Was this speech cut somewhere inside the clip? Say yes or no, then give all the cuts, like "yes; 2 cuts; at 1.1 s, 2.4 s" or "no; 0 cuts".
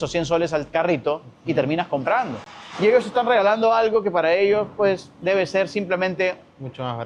no; 0 cuts